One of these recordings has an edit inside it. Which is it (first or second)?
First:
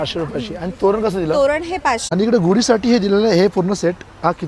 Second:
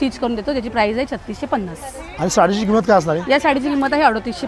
first